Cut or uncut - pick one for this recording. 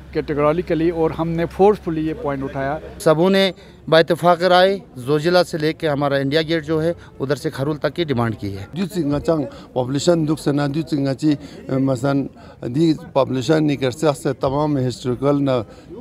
cut